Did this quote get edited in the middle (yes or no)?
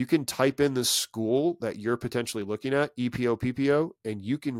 no